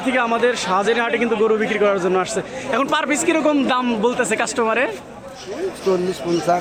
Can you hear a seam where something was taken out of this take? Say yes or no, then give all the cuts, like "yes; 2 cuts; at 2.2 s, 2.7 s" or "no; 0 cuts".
no; 0 cuts